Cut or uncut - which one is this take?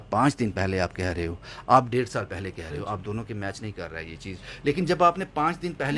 uncut